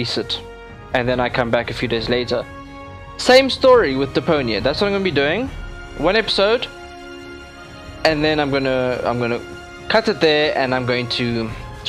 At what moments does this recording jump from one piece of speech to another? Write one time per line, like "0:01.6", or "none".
none